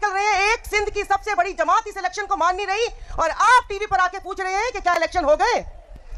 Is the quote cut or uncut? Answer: uncut